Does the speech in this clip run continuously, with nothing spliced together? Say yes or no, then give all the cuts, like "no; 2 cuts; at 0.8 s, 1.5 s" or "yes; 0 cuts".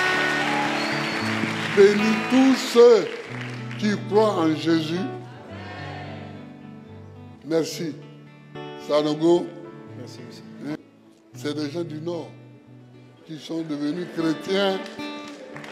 no; 1 cut; at 10.7 s